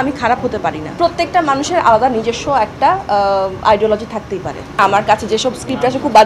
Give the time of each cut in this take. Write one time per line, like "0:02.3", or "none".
0:00.9
0:04.8